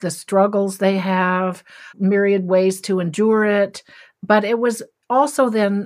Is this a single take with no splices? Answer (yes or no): no